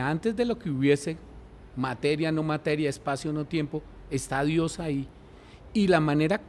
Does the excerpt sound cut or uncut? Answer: uncut